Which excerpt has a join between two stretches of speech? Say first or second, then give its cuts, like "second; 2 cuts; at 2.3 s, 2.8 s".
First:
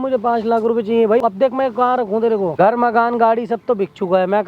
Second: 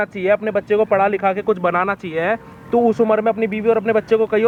first; 2 cuts; at 1.2 s, 2.5 s